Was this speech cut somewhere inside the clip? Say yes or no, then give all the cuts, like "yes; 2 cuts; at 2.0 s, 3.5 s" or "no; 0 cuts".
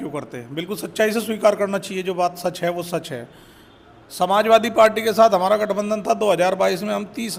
no; 0 cuts